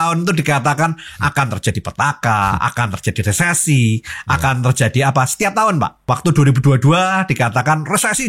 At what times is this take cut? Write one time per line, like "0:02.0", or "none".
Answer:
0:06.0